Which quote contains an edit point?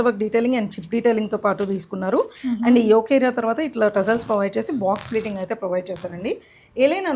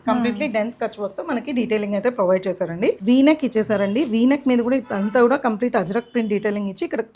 second; 1 cut; at 3.0 s

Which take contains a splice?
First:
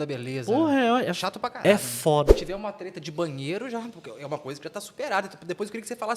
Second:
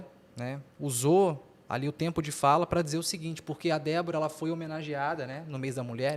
first; 1 cut; at 2.3 s

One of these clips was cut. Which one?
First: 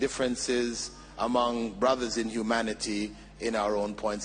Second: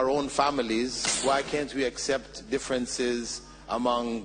second; 1 cut; at 1.1 s

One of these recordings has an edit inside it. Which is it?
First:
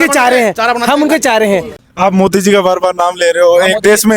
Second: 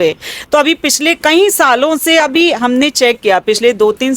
first; 1 cut; at 1.8 s

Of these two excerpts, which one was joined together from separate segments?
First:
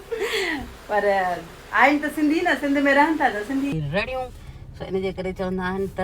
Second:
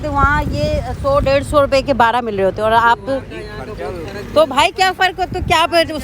first; 1 cut; at 3.7 s

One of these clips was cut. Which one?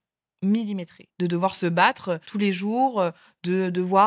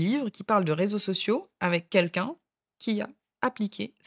first; 2 cuts; at 1.0 s, 2.3 s

